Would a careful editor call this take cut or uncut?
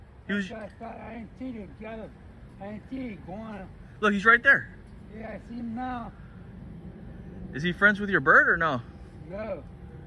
uncut